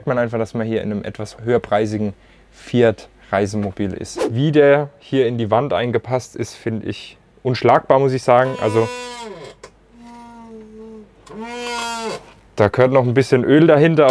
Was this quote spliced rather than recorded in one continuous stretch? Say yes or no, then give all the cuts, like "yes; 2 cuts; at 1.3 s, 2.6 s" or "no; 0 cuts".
yes; 2 cuts; at 1.3 s, 4.1 s